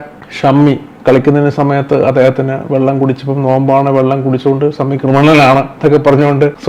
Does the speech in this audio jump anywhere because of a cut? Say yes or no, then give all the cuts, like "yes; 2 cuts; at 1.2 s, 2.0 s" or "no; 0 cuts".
no; 0 cuts